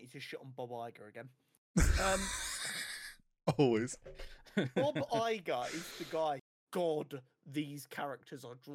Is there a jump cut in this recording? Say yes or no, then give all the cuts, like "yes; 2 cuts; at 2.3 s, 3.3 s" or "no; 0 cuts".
yes; 1 cut; at 6.5 s